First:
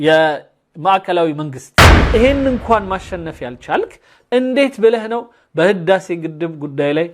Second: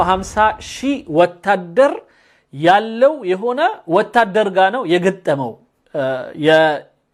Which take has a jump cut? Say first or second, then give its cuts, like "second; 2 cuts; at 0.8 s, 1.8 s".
first; 1 cut; at 2.1 s